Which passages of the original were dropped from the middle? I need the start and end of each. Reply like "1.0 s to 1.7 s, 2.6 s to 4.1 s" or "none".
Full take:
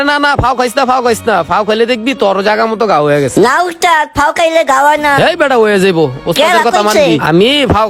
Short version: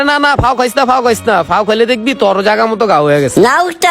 none

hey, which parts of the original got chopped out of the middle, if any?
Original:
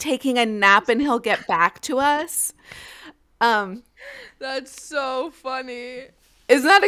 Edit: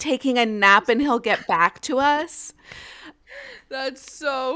3.2 s to 3.9 s

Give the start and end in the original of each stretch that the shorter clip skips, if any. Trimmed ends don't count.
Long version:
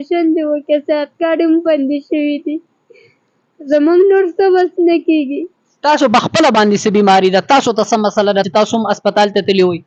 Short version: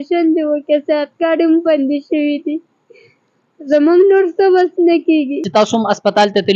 5.5 s to 8.5 s

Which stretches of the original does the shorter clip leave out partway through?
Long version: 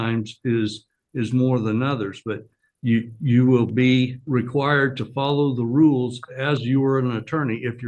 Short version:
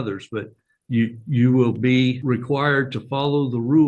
4.1 s to 4.2 s

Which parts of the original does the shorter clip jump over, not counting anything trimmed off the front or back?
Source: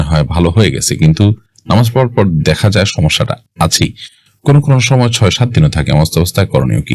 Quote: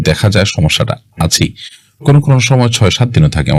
none

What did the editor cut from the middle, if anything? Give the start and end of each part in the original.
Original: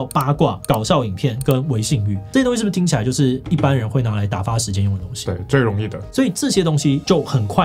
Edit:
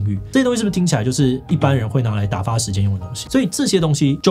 5.2 s to 6.0 s

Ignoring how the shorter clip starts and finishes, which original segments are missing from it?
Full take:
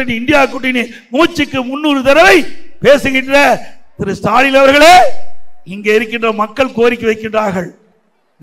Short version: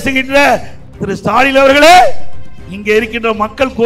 none

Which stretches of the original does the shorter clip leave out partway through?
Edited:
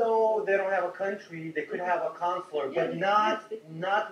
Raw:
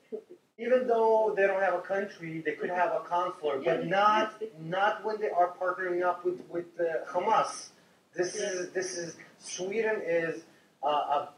none

